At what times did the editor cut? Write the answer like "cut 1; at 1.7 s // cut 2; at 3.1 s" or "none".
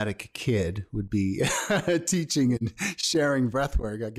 none